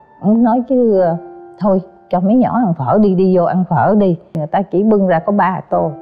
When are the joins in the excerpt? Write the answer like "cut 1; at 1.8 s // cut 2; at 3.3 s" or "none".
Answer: cut 1; at 4.4 s